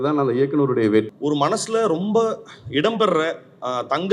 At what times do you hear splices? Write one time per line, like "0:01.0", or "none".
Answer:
0:01.1